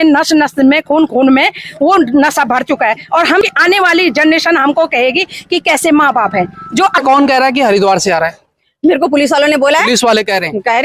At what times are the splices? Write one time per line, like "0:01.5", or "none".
0:03.4
0:07.0